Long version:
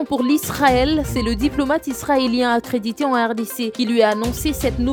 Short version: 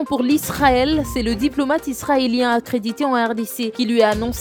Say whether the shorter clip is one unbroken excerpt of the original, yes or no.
yes